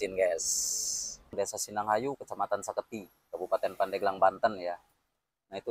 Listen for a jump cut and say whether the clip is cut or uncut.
cut